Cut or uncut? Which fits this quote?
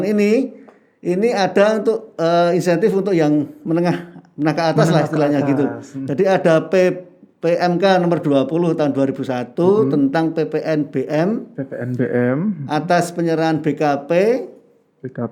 uncut